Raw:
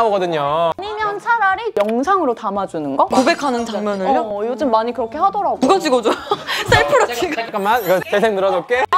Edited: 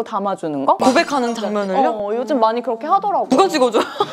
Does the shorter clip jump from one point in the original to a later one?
no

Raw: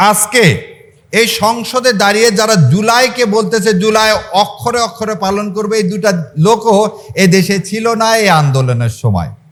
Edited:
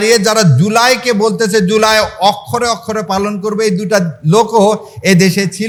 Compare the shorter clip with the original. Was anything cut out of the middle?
no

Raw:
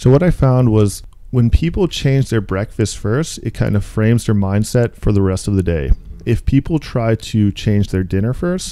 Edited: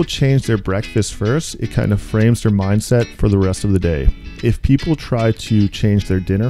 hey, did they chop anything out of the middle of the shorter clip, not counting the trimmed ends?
no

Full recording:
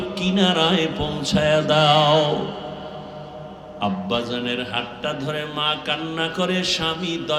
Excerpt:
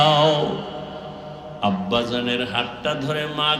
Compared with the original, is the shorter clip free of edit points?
no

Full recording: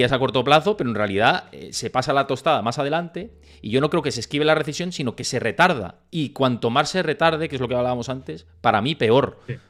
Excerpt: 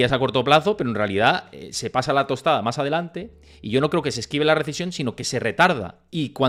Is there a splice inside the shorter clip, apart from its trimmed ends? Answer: no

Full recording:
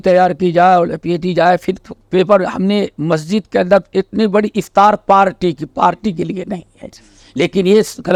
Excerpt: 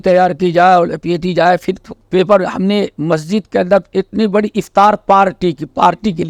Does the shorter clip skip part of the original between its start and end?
no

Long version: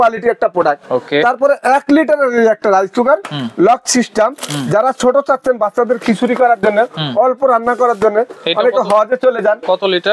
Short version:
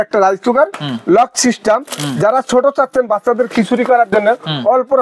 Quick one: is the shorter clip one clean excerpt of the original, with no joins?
yes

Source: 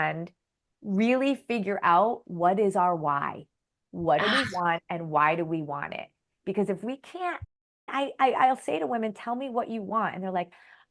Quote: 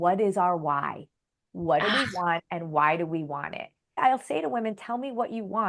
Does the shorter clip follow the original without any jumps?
no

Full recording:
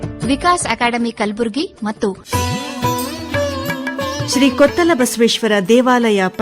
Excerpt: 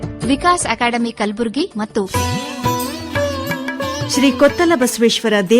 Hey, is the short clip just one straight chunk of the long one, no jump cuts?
no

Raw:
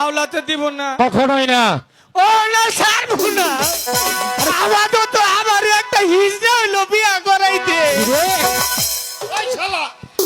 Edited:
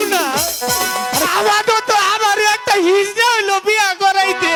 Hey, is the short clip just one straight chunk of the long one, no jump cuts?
yes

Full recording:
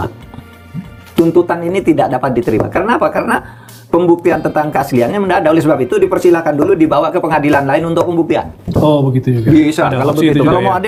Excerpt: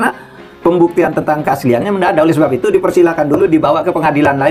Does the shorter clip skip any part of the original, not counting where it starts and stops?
no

